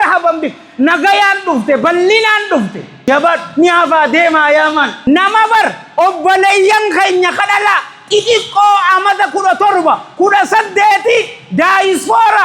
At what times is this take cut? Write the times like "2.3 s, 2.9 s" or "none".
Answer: 3.1 s, 4.9 s

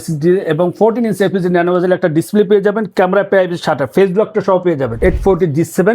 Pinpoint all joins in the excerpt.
4.9 s

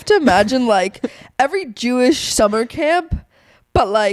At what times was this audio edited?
none

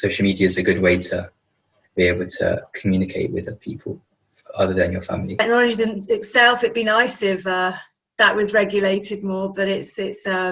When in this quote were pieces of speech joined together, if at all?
5.3 s

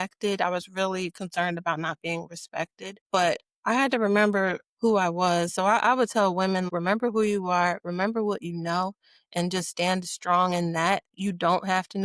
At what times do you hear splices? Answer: 6.7 s, 11.1 s

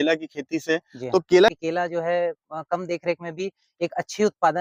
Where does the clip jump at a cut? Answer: 1.5 s

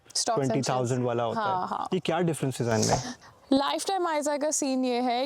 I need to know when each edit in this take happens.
3.1 s

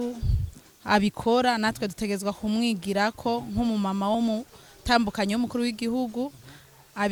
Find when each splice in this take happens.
none

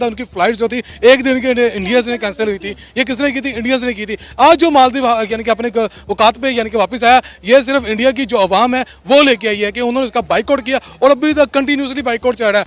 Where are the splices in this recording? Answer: none

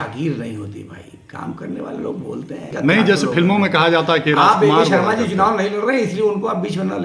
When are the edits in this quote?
2.7 s

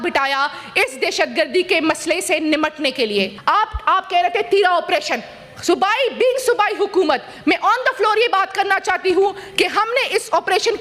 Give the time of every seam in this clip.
3.3 s

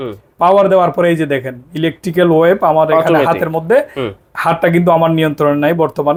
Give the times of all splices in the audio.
none

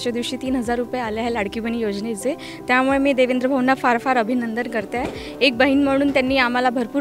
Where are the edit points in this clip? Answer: none

